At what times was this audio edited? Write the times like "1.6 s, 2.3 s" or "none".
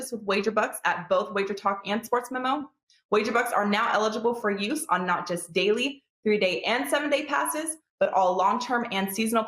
4.7 s

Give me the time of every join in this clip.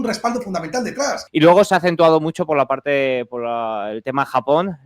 1.2 s

